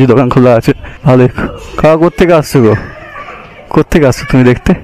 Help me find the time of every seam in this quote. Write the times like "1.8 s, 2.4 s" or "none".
0.9 s